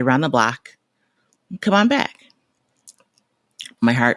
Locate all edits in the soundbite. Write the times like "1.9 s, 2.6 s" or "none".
none